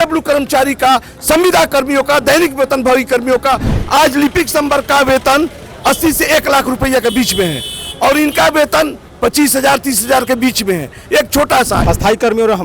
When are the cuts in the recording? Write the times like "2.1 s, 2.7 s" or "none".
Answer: 3.7 s, 11.8 s